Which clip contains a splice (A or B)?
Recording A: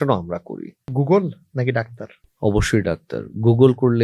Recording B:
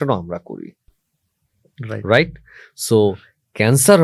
A